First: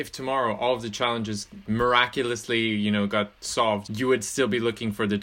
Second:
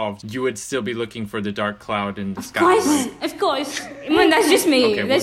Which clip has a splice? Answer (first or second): first